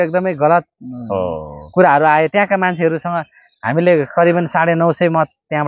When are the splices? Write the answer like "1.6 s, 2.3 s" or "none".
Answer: none